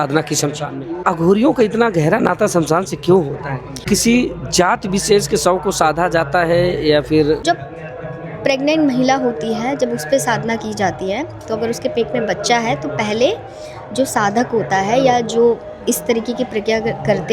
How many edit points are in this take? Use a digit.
3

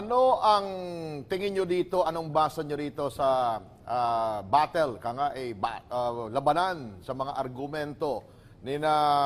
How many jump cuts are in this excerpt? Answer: 0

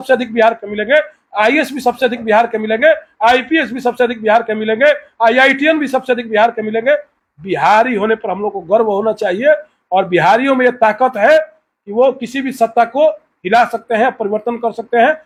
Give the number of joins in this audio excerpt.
0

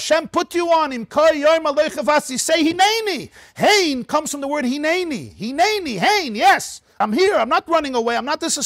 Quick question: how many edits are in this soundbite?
1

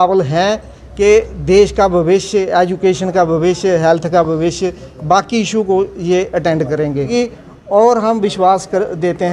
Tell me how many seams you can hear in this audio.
1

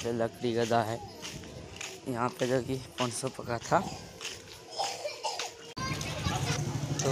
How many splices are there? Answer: 1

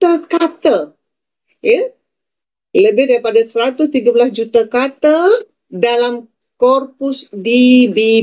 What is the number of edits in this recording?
0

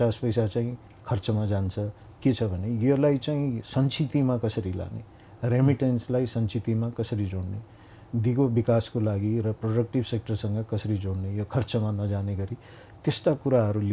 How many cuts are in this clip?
1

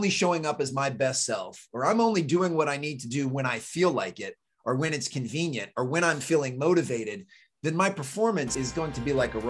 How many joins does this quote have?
1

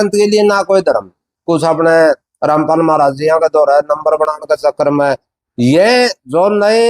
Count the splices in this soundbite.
1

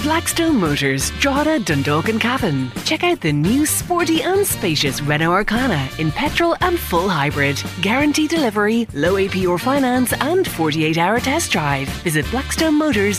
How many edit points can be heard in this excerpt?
0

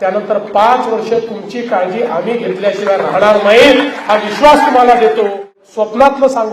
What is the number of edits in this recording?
1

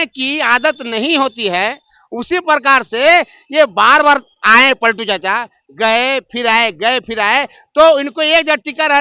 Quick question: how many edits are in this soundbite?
0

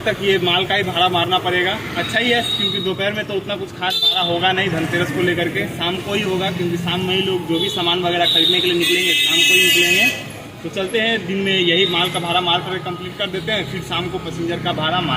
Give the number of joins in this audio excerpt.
0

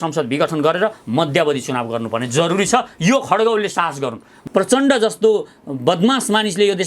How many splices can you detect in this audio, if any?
1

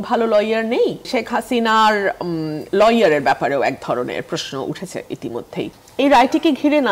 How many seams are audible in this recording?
2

